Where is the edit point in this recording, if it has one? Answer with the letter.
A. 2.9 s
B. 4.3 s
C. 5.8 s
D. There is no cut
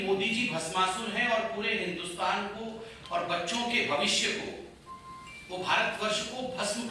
D